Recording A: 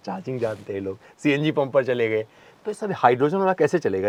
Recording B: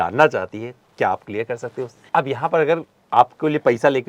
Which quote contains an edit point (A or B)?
B